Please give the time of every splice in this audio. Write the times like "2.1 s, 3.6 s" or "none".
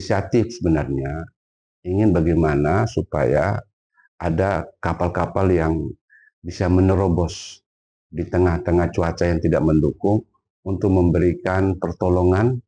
none